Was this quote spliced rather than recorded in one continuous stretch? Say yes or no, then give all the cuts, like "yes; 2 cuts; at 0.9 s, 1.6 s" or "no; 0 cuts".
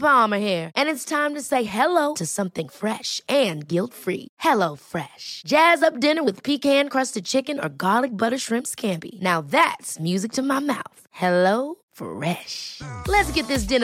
no; 0 cuts